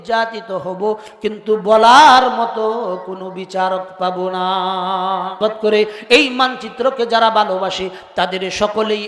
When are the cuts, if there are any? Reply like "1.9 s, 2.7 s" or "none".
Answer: 5.3 s